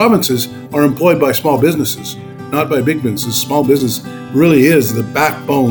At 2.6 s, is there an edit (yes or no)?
no